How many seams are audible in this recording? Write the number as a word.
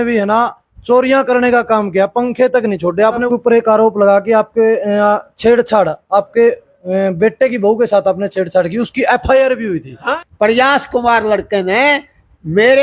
two